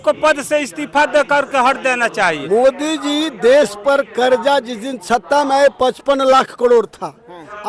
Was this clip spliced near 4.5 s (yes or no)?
no